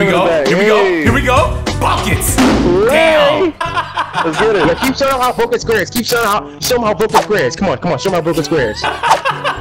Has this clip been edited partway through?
yes; 1 cut; at 3.6 s

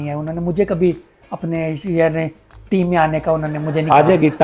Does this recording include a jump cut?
no; 0 cuts

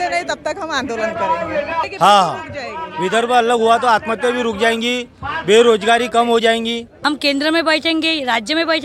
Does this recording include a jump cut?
yes; 2 cuts; at 1.9 s, 6.9 s

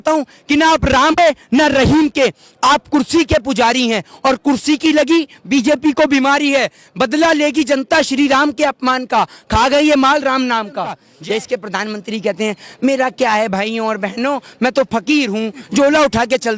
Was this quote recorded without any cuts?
no; 2 cuts; at 1.1 s, 11.1 s

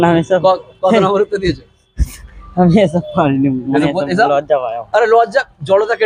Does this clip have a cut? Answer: no; 0 cuts

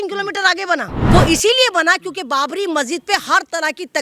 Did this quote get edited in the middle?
yes; 1 cut; at 1.0 s

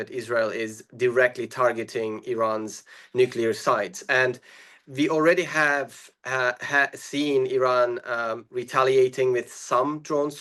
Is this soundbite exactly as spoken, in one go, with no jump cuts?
yes; 0 cuts

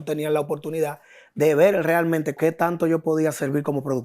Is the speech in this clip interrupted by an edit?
yes; 1 cut; at 2.4 s

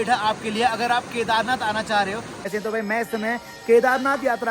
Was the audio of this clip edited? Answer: yes; 1 cut; at 2.5 s

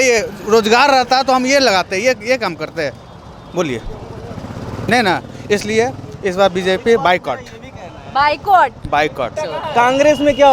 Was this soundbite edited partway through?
yes; 1 cut; at 9.4 s

